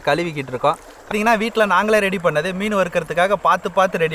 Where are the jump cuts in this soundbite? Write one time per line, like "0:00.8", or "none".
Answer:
0:01.1